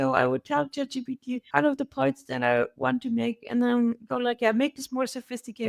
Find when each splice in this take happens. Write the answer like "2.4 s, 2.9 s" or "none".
1.4 s